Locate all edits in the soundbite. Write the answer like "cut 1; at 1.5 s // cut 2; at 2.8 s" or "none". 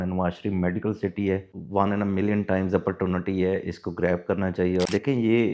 cut 1; at 1.5 s // cut 2; at 4.9 s